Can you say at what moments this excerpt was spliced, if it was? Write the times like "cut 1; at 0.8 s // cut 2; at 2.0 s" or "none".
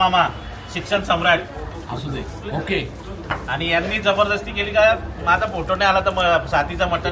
none